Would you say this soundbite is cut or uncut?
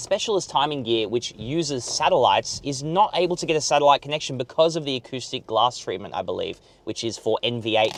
uncut